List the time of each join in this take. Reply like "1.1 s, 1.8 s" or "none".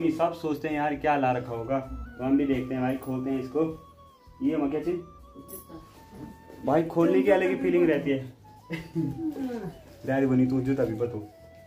none